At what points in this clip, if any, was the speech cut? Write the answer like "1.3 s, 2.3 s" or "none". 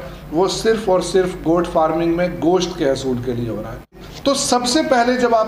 4.0 s